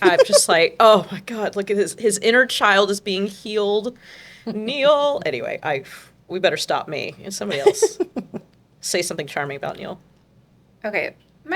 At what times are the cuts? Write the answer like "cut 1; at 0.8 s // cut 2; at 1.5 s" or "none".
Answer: none